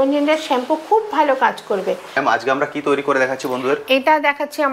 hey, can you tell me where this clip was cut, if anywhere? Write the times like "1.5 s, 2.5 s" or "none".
2.1 s